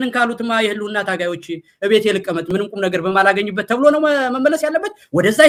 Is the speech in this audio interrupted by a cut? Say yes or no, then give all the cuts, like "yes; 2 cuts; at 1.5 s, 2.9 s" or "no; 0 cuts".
no; 0 cuts